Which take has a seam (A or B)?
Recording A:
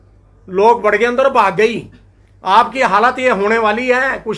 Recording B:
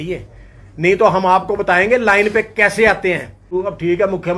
B